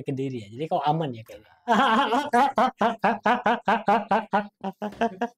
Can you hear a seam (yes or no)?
no